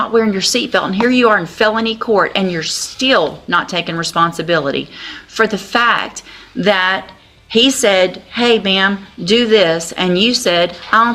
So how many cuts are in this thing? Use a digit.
0